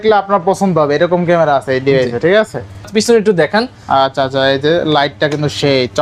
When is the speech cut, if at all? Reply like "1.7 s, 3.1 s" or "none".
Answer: 2.9 s

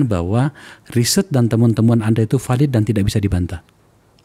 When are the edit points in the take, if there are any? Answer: none

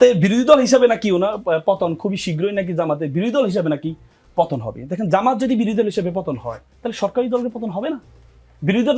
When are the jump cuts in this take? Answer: none

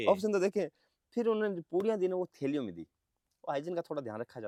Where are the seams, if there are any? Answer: none

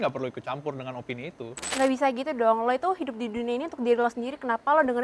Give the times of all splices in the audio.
1.6 s

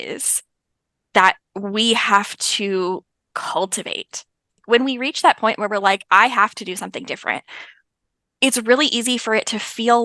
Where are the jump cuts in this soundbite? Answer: 4.6 s

